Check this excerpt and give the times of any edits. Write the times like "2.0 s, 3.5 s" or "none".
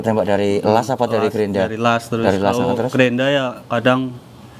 none